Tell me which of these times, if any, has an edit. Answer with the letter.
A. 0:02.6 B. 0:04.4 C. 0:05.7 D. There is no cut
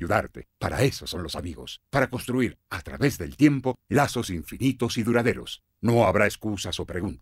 D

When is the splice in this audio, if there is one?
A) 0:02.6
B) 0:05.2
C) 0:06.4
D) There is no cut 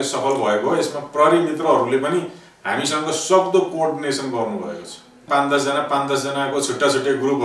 B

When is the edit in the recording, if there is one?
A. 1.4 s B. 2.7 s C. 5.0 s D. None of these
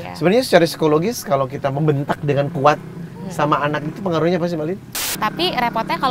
C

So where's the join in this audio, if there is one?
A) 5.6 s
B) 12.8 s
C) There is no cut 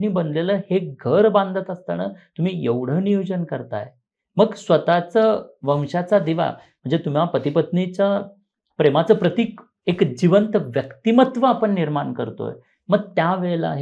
C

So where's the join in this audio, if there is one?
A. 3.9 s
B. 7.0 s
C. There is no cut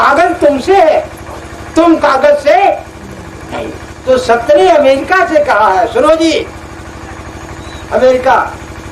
A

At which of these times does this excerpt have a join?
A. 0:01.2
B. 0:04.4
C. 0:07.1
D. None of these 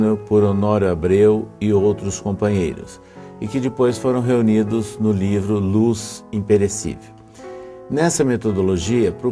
B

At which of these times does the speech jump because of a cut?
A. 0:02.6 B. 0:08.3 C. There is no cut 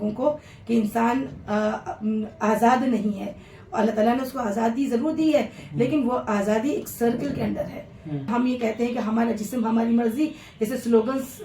B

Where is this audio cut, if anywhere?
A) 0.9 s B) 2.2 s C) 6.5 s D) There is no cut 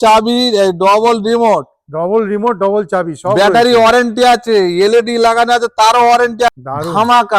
C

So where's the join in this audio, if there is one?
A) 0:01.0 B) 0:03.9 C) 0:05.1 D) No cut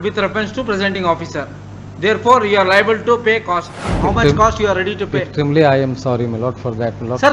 B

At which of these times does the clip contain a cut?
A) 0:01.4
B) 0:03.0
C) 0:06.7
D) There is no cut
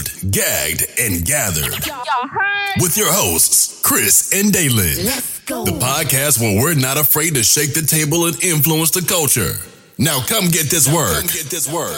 D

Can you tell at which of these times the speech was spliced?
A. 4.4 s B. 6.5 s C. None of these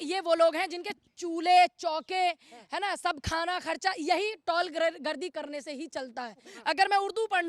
B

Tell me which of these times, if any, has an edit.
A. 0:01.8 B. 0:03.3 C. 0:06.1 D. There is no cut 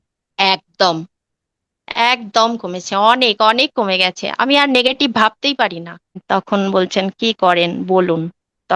C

